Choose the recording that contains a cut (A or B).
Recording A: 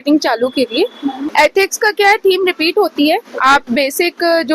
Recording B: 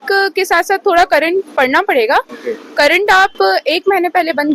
A